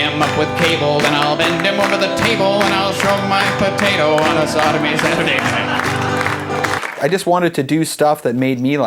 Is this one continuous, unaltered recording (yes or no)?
no